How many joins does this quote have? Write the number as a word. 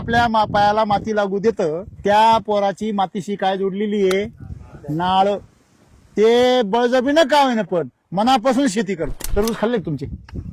two